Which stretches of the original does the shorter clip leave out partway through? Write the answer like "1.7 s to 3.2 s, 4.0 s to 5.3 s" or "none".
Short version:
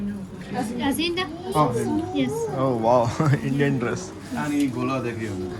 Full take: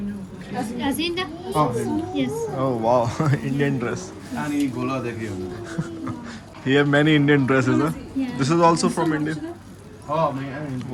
none